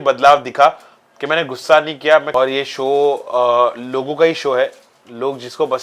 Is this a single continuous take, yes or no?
no